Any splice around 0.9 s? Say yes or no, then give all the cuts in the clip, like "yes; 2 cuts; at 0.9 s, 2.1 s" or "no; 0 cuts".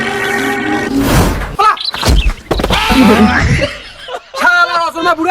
yes; 1 cut; at 0.9 s